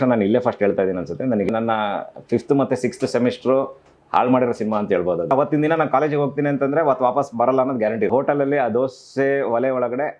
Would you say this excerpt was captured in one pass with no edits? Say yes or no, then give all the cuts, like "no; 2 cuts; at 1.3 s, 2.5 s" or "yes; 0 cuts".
no; 3 cuts; at 1.5 s, 5.3 s, 8.1 s